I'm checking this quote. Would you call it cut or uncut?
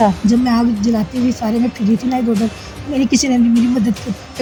uncut